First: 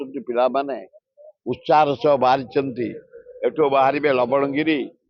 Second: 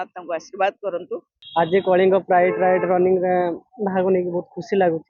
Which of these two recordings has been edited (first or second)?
second